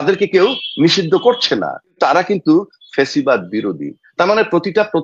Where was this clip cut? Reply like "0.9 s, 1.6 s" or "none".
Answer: 1.9 s